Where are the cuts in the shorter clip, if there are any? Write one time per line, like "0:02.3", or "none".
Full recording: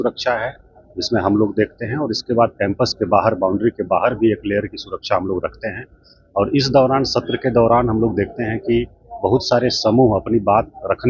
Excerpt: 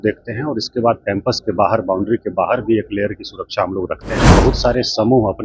0:04.2